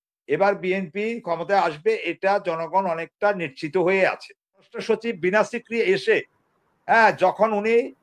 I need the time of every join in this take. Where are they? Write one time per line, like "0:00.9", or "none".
0:04.8